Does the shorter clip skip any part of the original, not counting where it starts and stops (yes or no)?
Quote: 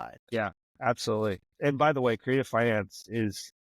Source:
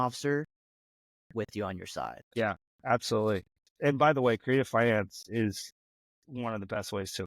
yes